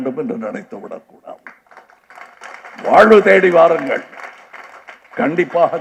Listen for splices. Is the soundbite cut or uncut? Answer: uncut